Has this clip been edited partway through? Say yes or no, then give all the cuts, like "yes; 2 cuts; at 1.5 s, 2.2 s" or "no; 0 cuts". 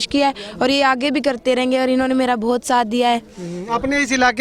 no; 0 cuts